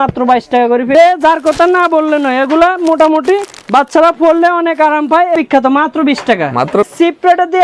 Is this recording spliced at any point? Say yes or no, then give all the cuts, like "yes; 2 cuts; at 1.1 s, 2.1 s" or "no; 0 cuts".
yes; 3 cuts; at 0.9 s, 5.3 s, 6.9 s